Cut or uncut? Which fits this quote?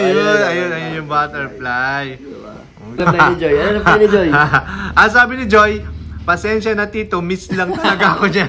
cut